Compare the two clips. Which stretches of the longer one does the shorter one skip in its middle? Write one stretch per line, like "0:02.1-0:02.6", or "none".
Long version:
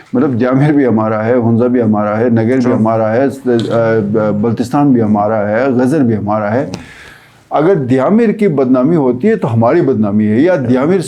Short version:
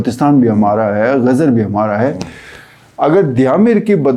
none